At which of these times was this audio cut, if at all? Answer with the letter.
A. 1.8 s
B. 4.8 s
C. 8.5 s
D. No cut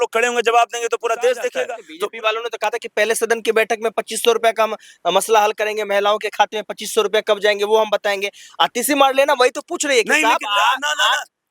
A